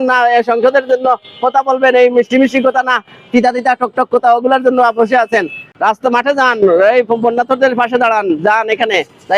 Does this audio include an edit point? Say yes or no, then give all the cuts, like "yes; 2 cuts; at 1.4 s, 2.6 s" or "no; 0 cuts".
no; 0 cuts